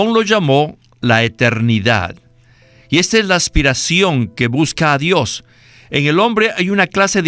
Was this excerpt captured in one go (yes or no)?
yes